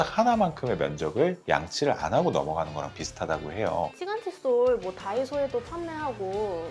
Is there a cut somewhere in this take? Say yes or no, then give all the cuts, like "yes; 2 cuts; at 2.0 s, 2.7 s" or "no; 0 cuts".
yes; 1 cut; at 3.9 s